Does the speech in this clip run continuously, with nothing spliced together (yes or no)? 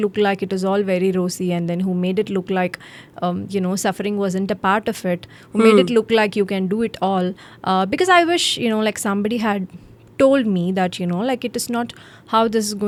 yes